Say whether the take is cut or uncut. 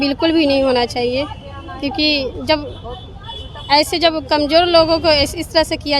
uncut